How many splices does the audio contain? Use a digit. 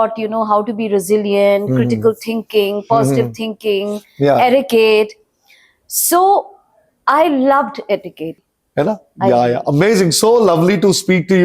1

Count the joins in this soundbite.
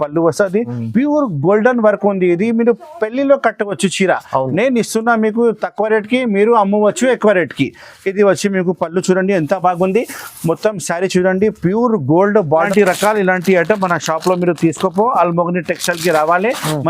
1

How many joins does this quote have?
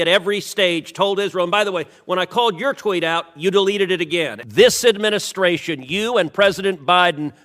1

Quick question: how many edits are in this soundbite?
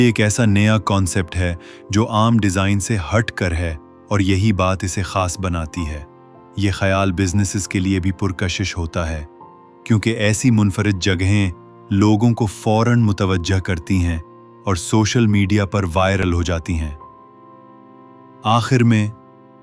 0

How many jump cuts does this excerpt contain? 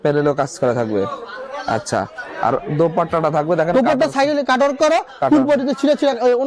0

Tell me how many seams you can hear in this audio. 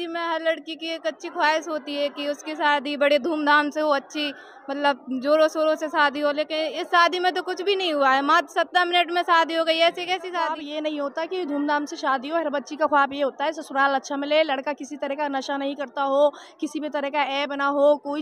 1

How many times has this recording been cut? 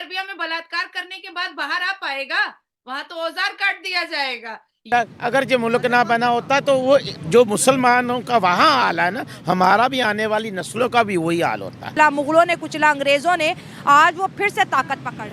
2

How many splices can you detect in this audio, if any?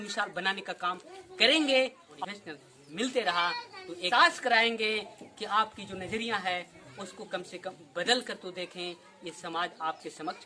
2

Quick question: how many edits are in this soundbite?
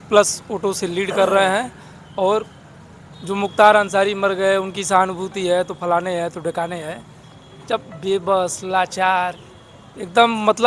0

